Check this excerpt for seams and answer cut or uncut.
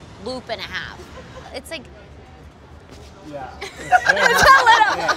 cut